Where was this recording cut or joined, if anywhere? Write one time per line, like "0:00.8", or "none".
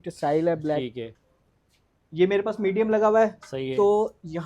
0:01.2